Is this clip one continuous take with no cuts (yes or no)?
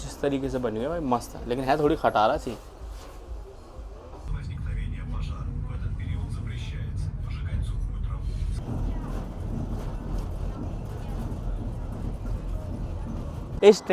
yes